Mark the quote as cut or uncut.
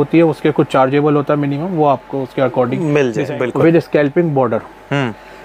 cut